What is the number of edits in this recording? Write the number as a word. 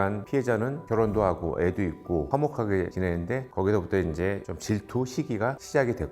one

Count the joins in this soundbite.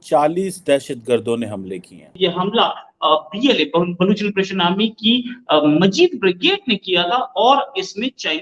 one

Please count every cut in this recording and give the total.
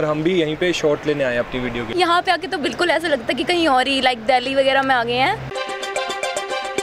two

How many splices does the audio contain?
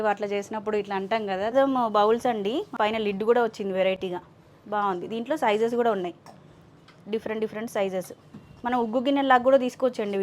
two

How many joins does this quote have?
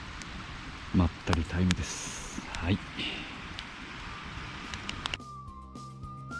one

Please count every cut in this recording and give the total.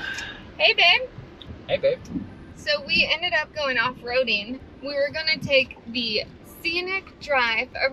zero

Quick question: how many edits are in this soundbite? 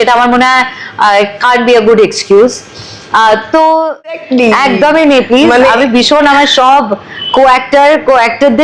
one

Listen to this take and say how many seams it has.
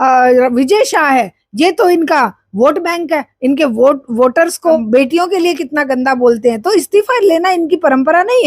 one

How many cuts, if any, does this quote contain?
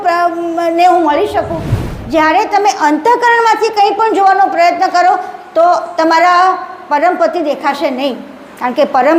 one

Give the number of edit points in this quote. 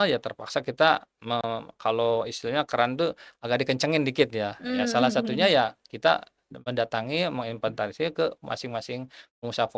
zero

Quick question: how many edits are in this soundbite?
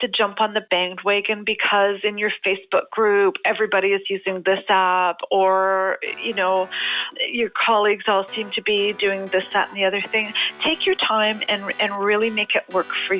one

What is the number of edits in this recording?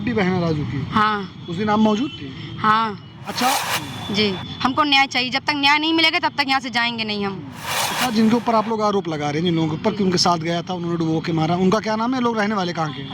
two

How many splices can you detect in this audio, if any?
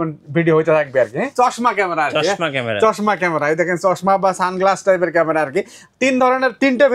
one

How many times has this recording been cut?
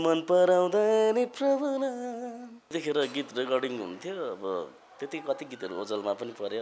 one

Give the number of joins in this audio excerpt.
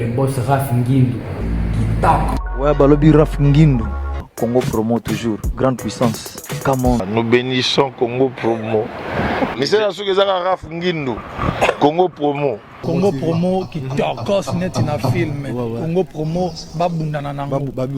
two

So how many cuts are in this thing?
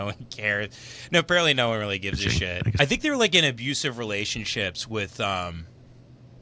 one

